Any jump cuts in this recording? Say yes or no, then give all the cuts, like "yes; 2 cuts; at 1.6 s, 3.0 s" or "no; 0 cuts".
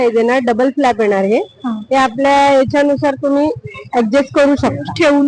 no; 0 cuts